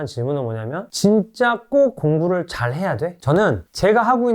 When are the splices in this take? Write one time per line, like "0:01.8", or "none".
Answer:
0:03.1

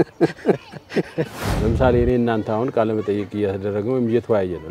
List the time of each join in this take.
0:01.4

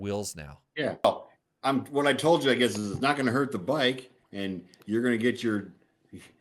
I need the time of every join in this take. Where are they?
0:01.0

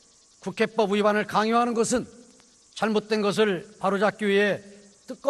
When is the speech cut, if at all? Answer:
0:02.9

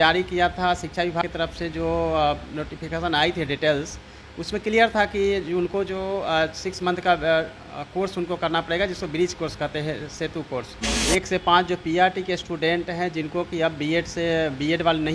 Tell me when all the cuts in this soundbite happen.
0:01.3
0:10.9

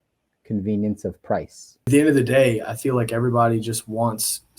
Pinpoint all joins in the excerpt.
0:01.9

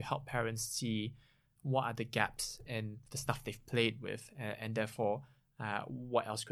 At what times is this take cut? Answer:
0:03.1

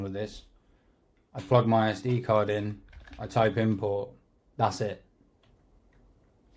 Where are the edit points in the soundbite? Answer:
none

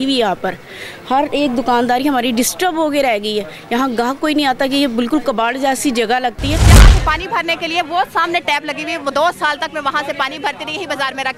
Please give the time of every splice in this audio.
0:06.7

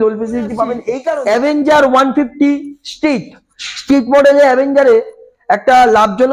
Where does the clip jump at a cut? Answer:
0:01.1

